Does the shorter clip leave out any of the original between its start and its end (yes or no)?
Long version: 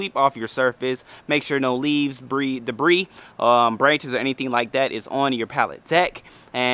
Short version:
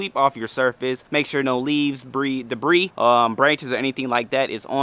yes